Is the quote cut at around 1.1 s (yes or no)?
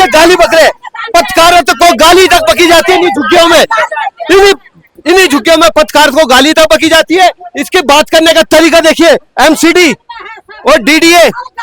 no